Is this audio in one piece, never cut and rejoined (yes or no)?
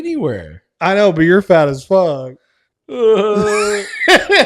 yes